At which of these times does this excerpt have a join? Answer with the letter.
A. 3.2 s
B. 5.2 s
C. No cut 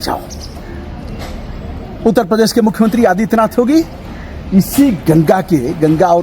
C